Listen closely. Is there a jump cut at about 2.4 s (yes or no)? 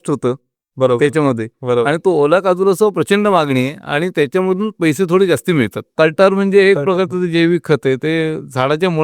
no